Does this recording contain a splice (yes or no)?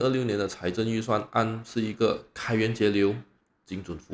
no